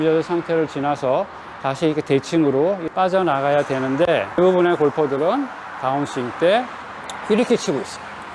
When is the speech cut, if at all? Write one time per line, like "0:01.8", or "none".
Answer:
0:04.3

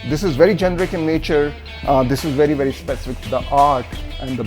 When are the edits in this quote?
0:03.1

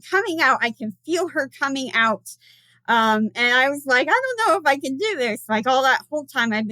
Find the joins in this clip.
none

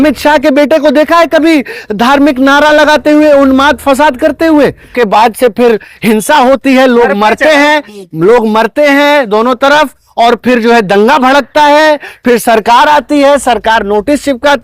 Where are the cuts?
0:04.9

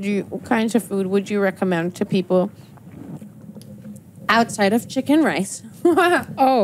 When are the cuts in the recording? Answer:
none

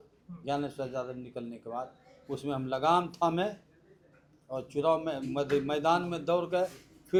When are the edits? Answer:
none

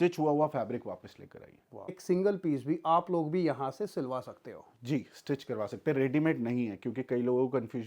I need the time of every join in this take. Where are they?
0:02.0

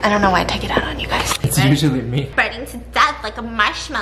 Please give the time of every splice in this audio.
0:02.3

